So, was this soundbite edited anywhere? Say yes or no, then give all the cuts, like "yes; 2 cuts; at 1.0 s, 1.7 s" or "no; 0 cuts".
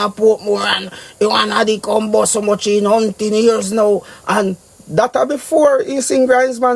no; 0 cuts